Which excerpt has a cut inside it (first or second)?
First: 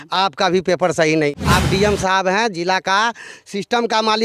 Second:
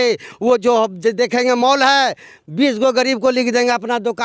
first